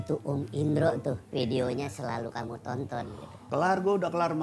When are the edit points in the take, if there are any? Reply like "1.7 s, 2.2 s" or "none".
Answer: 1.2 s, 3.3 s